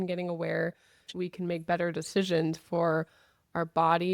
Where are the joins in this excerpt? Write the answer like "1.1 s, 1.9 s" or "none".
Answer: 1.1 s